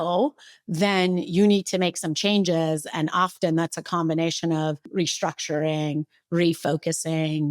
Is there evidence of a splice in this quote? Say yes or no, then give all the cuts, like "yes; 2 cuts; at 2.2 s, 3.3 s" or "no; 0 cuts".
yes; 1 cut; at 4.9 s